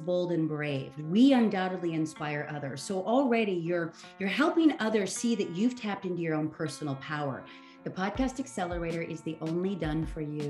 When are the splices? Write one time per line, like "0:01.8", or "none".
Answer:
0:07.5